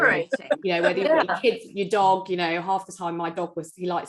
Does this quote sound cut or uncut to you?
uncut